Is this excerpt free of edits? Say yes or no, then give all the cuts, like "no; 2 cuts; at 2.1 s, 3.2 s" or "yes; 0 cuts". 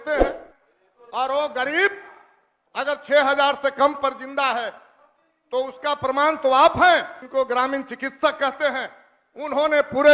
no; 1 cut; at 7.2 s